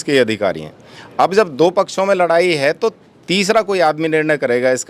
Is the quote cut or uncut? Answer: uncut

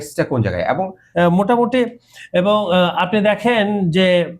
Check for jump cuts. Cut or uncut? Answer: cut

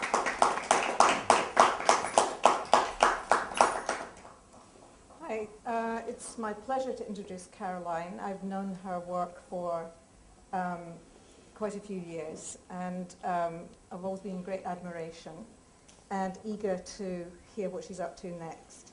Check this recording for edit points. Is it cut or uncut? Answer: cut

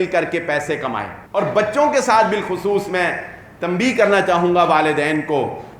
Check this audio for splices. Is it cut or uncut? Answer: cut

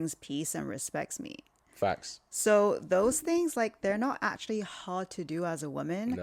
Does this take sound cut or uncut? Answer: uncut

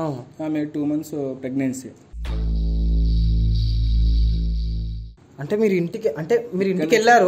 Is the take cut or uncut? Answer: uncut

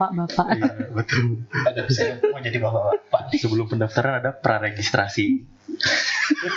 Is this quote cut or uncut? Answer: uncut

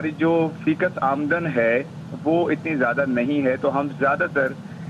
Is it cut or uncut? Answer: uncut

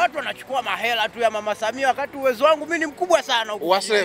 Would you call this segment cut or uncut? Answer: uncut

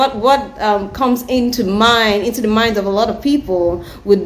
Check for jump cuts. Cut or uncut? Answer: uncut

